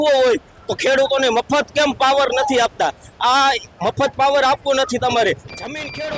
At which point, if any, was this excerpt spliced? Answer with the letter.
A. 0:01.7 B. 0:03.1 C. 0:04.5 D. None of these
D